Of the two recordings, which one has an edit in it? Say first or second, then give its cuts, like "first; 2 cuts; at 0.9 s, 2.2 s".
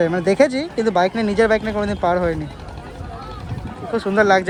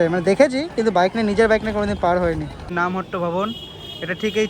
second; 1 cut; at 2.6 s